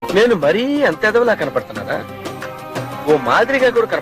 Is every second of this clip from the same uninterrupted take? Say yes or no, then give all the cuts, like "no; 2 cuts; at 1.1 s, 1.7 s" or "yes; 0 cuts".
yes; 0 cuts